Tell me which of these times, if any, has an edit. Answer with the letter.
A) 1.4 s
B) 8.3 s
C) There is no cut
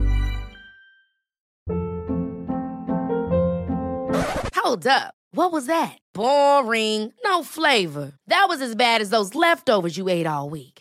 A